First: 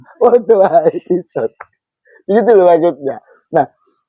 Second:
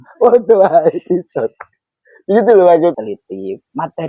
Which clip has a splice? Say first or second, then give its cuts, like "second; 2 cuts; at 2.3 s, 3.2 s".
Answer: second; 1 cut; at 3.0 s